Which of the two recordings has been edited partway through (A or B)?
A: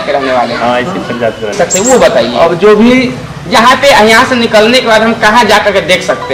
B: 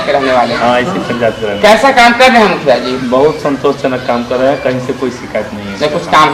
A